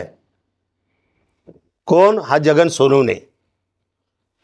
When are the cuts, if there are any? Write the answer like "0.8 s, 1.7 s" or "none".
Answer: none

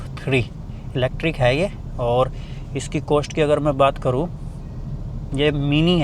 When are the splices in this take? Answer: none

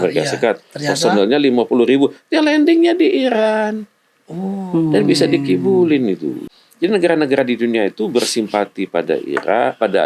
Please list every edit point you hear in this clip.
6.3 s

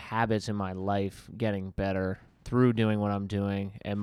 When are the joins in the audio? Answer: none

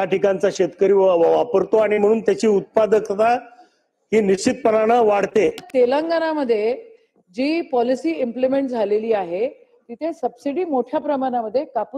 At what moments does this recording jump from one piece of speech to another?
5.7 s

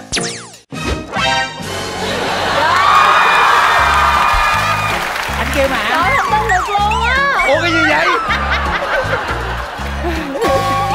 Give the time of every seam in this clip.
none

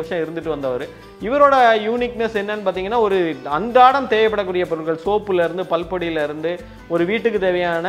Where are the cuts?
none

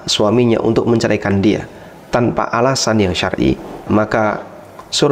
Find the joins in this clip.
3.8 s

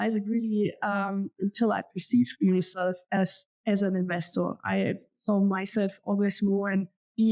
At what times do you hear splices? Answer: none

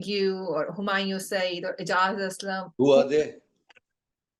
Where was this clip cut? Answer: 2.7 s

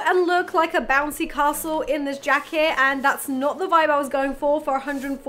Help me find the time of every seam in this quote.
none

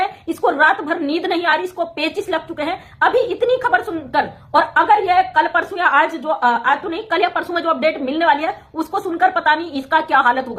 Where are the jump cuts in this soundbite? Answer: none

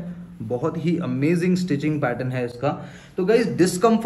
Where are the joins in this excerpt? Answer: none

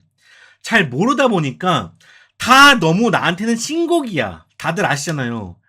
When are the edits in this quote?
4.5 s

